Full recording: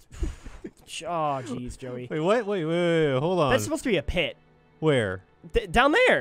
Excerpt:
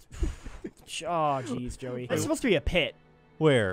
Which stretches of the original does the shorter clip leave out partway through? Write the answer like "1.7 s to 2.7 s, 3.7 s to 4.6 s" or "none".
2.2 s to 3.6 s